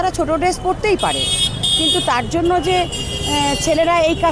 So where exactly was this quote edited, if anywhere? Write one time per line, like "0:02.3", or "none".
none